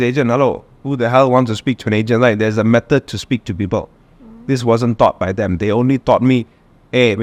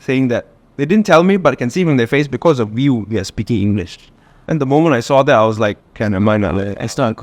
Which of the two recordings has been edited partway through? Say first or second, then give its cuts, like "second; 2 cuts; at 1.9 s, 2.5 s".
second; 1 cut; at 5.9 s